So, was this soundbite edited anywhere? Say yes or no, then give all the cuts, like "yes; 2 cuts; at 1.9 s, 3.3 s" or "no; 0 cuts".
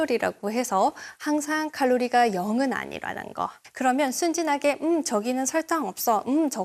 yes; 1 cut; at 3.6 s